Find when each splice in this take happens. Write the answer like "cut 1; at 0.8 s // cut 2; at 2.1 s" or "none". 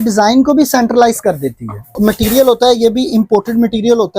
cut 1; at 1.9 s

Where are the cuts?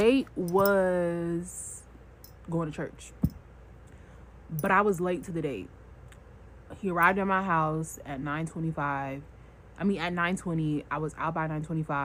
none

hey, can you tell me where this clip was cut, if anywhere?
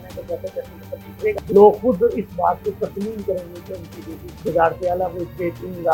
cut 1; at 1.4 s // cut 2; at 4.5 s

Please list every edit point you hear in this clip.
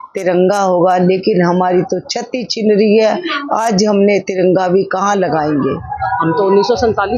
cut 1; at 5.9 s

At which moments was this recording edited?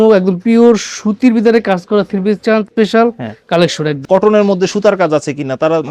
cut 1; at 2.7 s // cut 2; at 4.0 s

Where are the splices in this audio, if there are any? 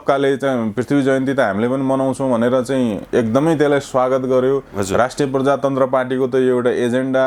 none

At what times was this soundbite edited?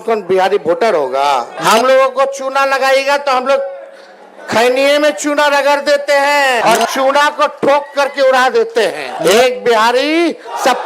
cut 1; at 1.5 s // cut 2; at 6.6 s // cut 3; at 9.1 s

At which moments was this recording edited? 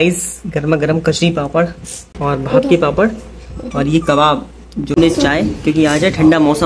cut 1; at 5.0 s

